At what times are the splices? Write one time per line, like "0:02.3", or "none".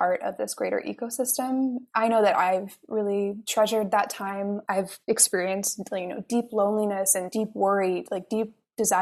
none